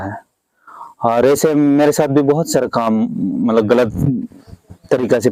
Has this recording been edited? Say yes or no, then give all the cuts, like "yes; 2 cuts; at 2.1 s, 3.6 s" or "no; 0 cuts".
no; 0 cuts